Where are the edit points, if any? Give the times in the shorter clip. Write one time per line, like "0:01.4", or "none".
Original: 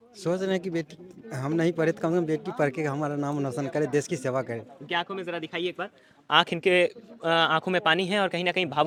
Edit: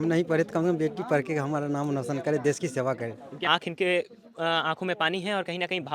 0:03.3